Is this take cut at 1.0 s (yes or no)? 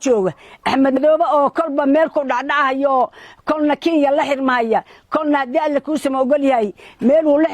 yes